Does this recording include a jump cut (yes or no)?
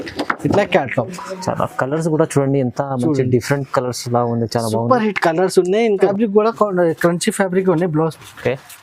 yes